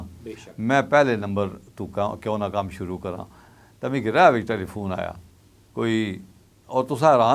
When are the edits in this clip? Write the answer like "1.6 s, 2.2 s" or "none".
3.5 s